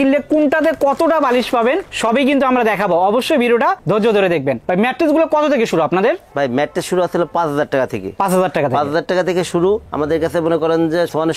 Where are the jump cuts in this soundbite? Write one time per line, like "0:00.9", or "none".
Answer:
none